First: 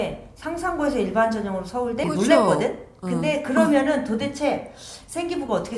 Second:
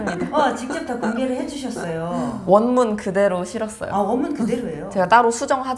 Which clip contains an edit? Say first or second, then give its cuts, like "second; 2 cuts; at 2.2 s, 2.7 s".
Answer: first; 1 cut; at 2.0 s